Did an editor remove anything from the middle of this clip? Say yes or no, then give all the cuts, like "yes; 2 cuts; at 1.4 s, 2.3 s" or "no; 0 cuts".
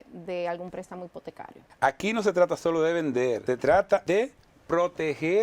yes; 3 cuts; at 1.6 s, 3.4 s, 4.0 s